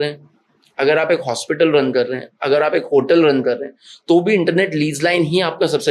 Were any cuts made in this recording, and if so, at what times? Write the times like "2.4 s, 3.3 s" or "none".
none